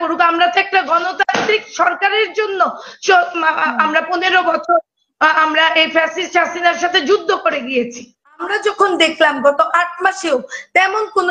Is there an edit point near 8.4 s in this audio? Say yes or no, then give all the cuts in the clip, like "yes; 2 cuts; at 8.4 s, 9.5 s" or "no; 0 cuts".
yes; 1 cut; at 8.4 s